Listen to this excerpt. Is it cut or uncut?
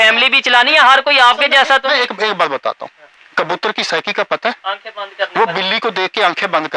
uncut